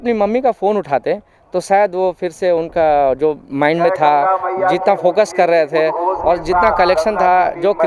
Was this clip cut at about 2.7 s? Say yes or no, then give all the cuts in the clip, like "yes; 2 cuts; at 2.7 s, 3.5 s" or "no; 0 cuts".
no; 0 cuts